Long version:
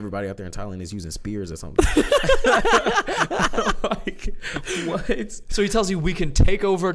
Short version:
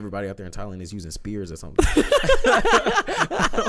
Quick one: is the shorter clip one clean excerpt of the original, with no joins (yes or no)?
yes